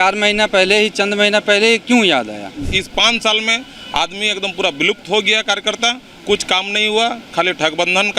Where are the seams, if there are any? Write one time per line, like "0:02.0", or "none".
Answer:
0:02.7